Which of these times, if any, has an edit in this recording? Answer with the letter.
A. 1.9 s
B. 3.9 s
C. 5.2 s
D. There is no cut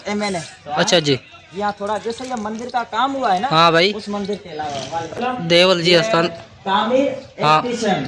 C